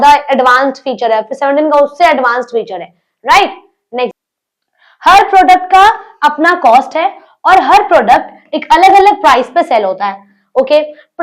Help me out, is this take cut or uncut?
cut